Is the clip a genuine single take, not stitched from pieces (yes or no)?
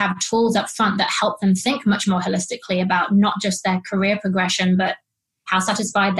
yes